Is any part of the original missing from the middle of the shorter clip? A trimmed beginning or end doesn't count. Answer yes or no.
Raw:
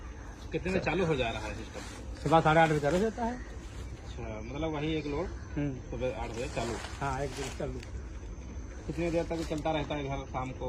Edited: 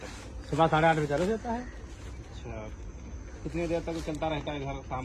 yes